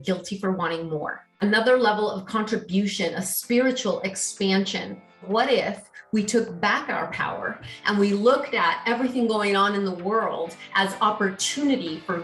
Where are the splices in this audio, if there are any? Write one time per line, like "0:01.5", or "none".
0:01.2
0:05.3